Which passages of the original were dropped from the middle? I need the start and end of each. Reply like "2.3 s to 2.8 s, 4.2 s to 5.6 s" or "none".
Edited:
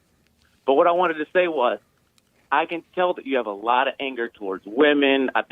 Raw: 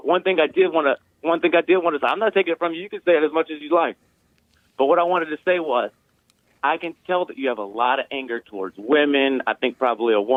none